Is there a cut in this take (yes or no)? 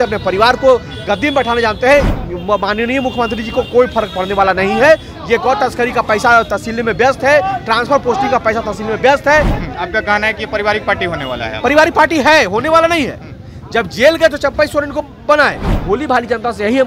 yes